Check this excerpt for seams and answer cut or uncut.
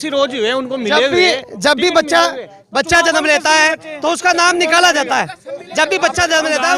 uncut